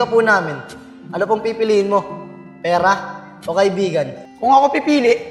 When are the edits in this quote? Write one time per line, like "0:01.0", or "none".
0:04.2